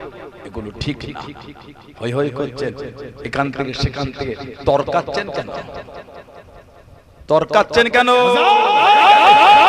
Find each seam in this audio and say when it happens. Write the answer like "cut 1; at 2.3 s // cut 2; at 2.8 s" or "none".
cut 1; at 8.7 s